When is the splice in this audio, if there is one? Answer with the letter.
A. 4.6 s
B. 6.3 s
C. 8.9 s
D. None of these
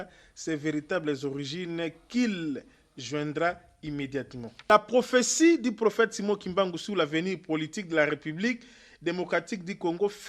A